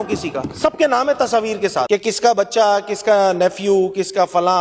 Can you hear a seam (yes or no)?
yes